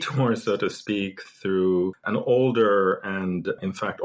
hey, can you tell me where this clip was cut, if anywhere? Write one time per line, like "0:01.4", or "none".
0:02.0